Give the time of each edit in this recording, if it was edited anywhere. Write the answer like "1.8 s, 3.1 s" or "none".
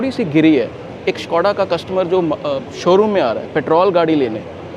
0.9 s